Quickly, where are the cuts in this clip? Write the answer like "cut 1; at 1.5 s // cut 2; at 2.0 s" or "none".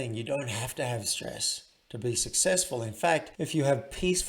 cut 1; at 3.3 s

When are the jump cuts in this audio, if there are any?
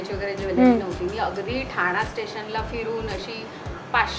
none

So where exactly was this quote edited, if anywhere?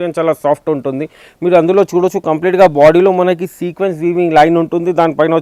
none

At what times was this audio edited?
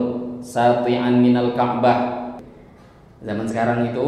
cut 1; at 2.3 s

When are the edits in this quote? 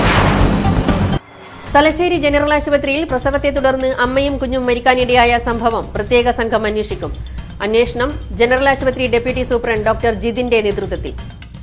cut 1; at 1.2 s

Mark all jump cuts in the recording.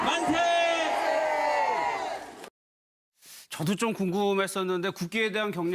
cut 1; at 4.1 s

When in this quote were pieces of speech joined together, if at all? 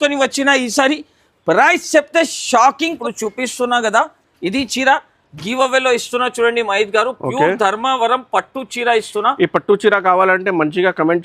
cut 1; at 3.0 s

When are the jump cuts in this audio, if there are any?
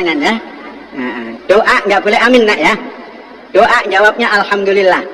none

